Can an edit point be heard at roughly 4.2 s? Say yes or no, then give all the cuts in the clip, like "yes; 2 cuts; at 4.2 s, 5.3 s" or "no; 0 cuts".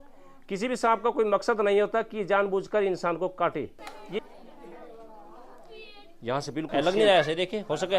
yes; 2 cuts; at 4.2 s, 6.7 s